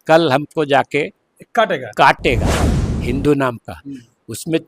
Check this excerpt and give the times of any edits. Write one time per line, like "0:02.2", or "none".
0:02.5